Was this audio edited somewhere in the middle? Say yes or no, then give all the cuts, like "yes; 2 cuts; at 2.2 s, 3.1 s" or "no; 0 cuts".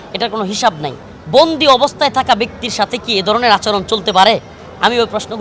yes; 1 cut; at 1.1 s